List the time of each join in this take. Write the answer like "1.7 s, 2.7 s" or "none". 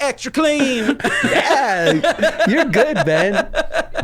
1.0 s